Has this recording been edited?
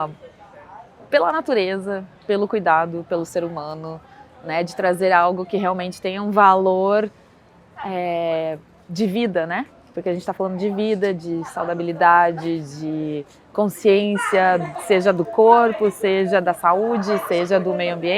no; 0 cuts

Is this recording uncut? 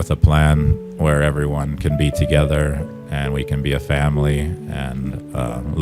yes; 0 cuts

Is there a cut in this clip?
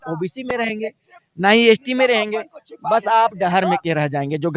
no; 0 cuts

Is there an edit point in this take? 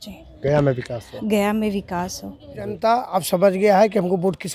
yes; 1 cut; at 2.8 s

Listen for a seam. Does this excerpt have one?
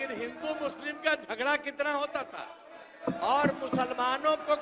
no; 0 cuts

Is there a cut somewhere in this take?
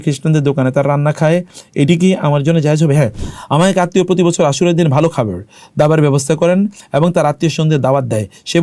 yes; 1 cut; at 3.2 s

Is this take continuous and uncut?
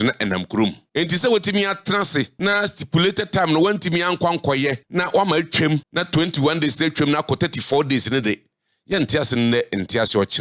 no; 4 cuts; at 0.8 s, 2.3 s, 4.8 s, 5.9 s

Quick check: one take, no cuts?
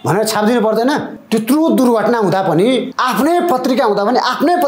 no; 2 cuts; at 1.2 s, 2.9 s

